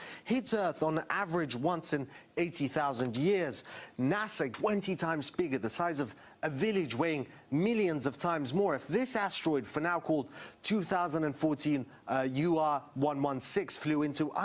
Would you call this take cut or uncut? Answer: uncut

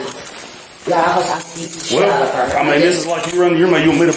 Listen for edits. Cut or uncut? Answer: uncut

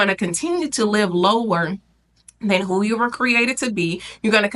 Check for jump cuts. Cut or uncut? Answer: uncut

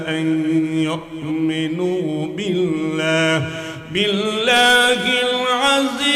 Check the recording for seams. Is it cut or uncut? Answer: uncut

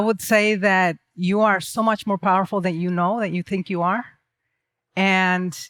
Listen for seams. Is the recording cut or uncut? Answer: uncut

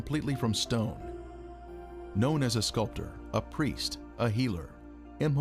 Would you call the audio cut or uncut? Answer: uncut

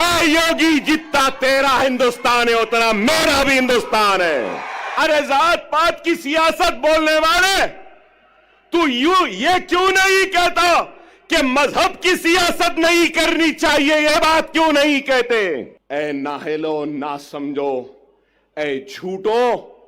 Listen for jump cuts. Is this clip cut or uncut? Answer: cut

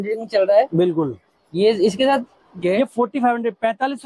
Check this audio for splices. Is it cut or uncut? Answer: cut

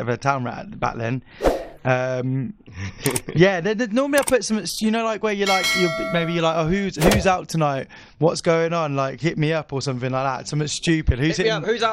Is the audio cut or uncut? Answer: uncut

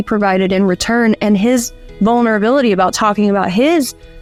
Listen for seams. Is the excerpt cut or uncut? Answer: uncut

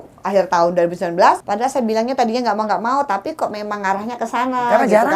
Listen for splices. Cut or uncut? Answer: cut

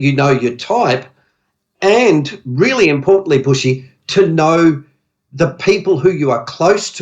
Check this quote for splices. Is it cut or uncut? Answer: uncut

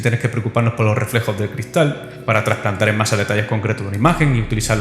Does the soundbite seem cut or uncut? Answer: cut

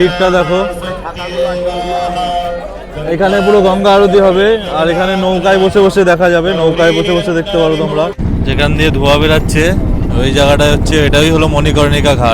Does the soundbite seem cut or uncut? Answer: cut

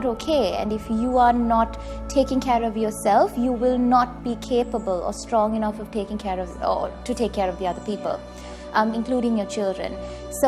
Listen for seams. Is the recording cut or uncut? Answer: uncut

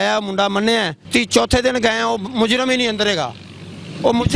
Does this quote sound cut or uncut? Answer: cut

